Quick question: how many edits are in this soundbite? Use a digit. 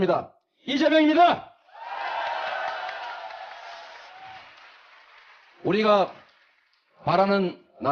0